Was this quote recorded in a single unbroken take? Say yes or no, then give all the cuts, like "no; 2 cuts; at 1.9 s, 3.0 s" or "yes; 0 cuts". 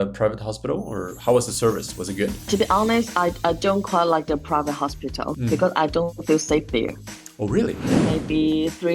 no; 2 cuts; at 5.4 s, 8.0 s